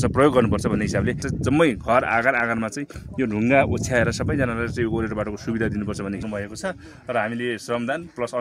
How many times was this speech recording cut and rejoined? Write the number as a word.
two